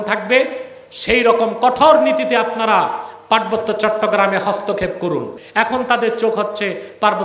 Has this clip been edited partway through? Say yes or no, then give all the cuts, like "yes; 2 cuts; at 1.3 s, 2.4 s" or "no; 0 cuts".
yes; 1 cut; at 5.4 s